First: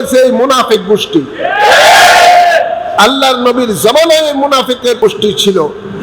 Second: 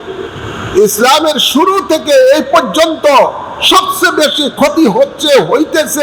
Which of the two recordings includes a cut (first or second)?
first